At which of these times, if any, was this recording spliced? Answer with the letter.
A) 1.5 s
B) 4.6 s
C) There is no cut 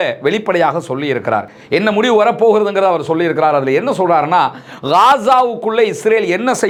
C